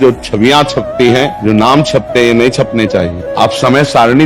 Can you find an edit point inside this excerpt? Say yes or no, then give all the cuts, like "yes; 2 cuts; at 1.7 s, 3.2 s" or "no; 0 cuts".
yes; 2 cuts; at 1.4 s, 3.2 s